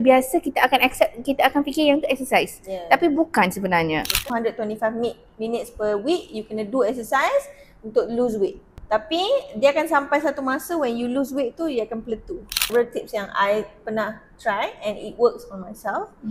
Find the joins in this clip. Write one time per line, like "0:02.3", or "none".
0:04.2
0:08.7
0:12.7